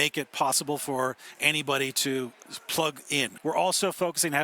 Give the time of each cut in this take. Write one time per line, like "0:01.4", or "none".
0:02.4
0:03.3